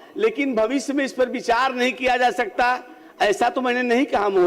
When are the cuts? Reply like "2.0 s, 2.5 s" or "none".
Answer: none